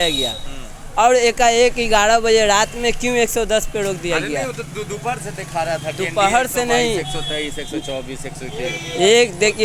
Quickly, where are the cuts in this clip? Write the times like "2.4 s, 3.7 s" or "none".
none